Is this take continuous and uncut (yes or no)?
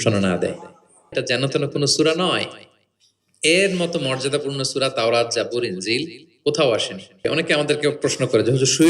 no